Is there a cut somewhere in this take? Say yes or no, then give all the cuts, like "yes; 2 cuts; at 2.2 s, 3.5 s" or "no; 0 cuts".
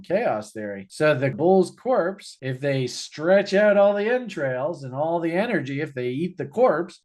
yes; 1 cut; at 1.4 s